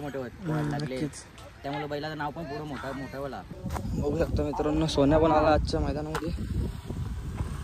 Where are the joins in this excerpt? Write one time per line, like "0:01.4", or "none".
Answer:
0:03.5